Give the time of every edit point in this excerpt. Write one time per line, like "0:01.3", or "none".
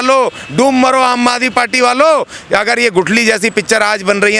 none